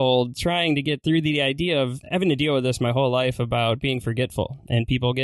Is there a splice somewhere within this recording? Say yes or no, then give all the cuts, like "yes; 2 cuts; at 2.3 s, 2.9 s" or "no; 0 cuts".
yes; 2 cuts; at 1.0 s, 2.0 s